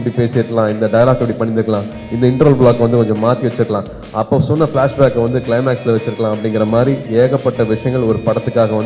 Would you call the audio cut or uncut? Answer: uncut